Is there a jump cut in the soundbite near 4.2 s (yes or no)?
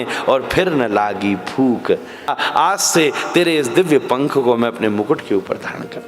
no